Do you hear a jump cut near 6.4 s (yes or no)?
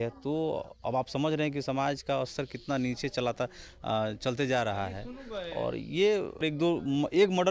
yes